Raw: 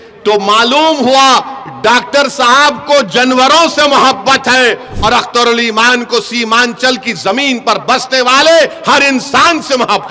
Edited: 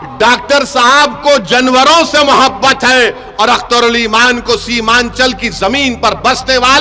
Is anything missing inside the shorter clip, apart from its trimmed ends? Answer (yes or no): no